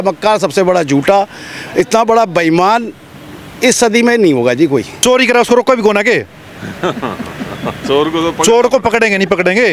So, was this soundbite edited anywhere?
yes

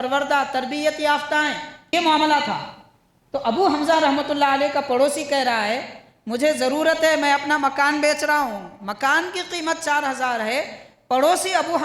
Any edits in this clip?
yes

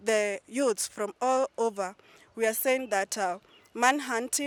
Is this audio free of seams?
yes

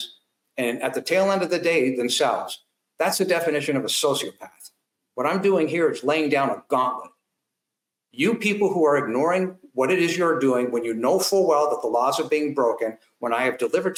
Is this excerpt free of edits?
yes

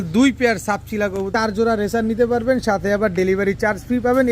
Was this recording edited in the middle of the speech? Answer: yes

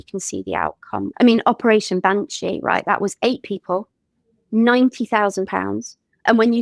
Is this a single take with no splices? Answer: no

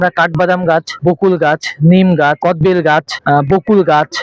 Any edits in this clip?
yes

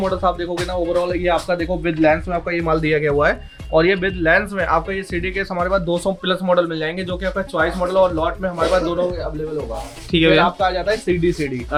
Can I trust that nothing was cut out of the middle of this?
yes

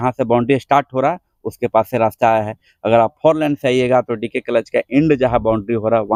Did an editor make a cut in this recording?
no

